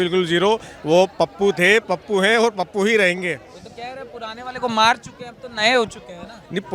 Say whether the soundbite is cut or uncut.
uncut